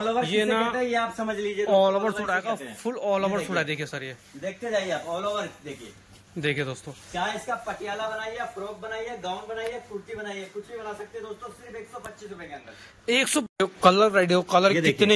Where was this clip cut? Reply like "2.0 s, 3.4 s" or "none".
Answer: 13.4 s